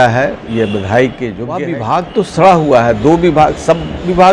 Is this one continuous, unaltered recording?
no; 1 cut; at 1.6 s

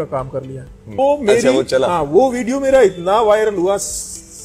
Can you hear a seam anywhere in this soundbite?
yes; 1 cut; at 0.9 s

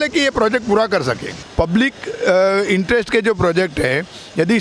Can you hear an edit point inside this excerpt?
yes; 1 cut; at 1.4 s

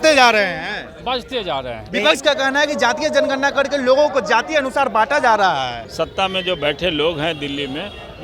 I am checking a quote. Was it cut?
yes; 2 cuts; at 1.8 s, 5.8 s

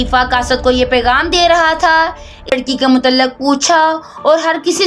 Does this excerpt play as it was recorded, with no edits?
no; 1 cut; at 2.5 s

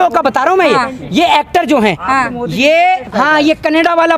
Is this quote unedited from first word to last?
no; 1 cut; at 3.1 s

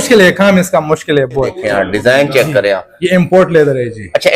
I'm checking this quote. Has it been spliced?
yes; 1 cut; at 1.6 s

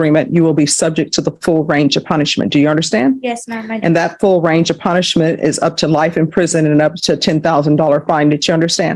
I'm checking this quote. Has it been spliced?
no; 0 cuts

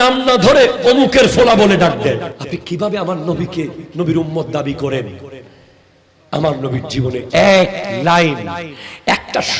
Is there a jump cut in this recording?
yes; 1 cut; at 2.4 s

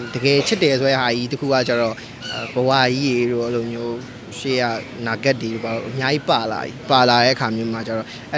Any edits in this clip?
no; 0 cuts

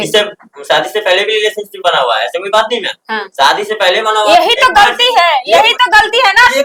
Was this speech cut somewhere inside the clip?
no; 0 cuts

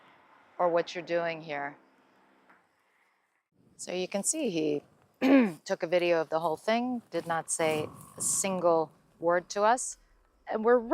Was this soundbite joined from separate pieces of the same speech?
yes; 1 cut; at 3.6 s

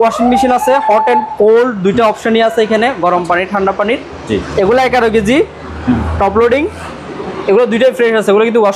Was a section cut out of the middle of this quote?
no; 0 cuts

